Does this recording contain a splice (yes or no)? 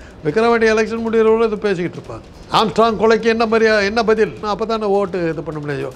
yes